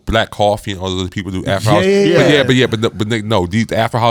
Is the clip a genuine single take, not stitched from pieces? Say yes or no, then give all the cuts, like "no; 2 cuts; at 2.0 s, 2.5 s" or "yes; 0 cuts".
yes; 0 cuts